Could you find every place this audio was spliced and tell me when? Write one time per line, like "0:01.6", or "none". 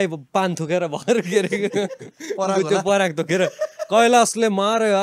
none